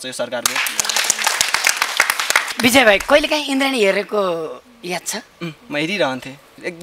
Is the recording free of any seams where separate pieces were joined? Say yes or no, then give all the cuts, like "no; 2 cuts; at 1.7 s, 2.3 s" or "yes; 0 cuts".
yes; 0 cuts